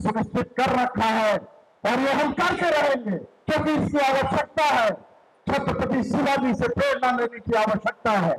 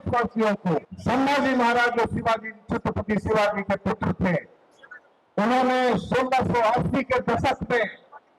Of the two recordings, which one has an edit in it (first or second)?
second